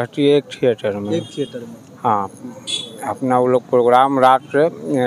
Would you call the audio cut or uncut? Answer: uncut